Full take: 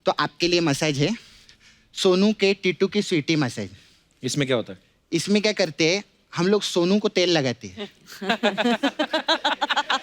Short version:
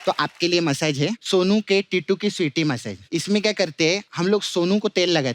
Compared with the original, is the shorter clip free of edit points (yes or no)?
no